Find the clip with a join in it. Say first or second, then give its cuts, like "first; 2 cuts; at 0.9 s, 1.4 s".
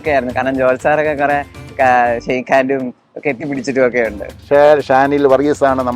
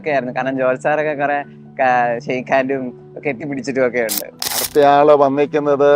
first; 1 cut; at 4.3 s